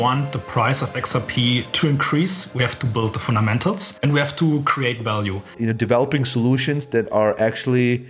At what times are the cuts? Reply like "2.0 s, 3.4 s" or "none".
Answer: 1.7 s, 3.9 s, 5.4 s